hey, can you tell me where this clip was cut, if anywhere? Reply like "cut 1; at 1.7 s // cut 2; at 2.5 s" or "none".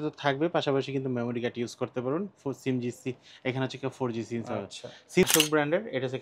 cut 1; at 5.2 s